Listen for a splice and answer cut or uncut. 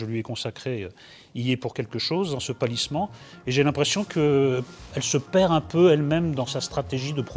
uncut